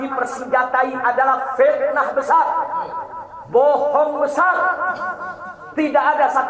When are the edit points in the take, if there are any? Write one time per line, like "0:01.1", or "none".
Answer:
none